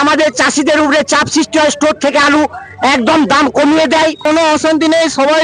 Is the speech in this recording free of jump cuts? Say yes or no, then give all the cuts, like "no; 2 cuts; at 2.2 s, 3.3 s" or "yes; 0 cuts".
no; 1 cut; at 4.2 s